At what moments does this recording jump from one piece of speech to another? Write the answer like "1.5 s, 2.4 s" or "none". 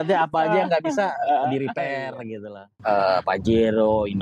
2.4 s

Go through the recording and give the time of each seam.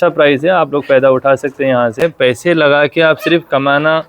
2.0 s

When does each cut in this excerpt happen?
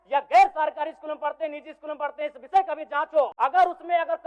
3.3 s

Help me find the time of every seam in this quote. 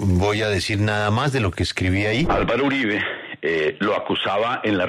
2.3 s

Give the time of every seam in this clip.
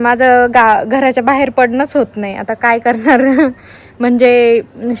none

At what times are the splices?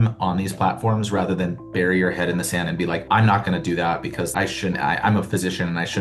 3.0 s

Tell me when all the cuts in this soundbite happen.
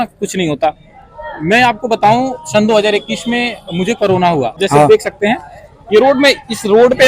4.6 s

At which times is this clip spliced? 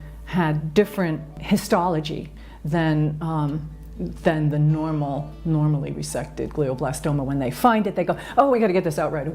1.4 s

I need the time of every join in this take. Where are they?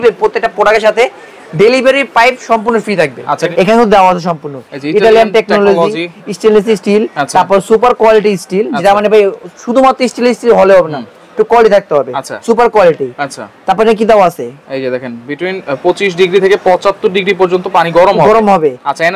3.4 s

